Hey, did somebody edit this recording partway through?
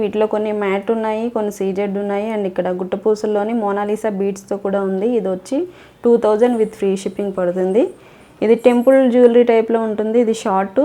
no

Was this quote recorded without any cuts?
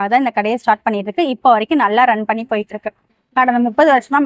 yes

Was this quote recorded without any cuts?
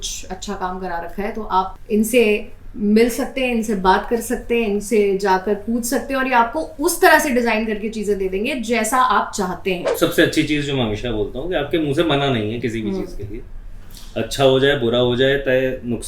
no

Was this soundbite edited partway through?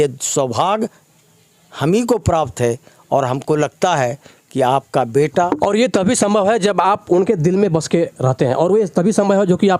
no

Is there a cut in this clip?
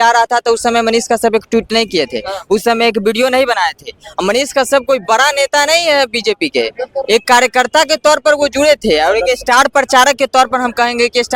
no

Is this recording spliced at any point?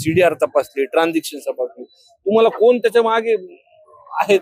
no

